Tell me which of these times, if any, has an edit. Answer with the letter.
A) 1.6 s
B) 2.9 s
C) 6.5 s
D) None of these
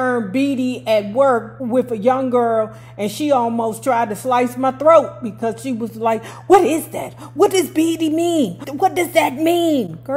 A